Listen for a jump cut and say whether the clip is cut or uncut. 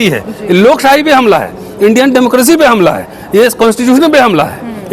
uncut